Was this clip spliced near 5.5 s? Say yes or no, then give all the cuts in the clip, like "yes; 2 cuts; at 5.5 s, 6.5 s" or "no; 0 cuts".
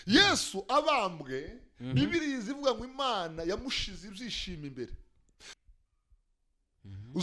yes; 1 cut; at 5.5 s